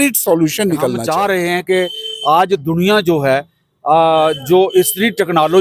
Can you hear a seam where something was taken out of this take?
yes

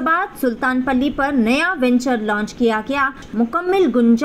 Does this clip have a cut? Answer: yes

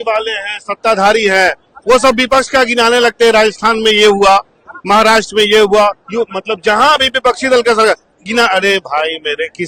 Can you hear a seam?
no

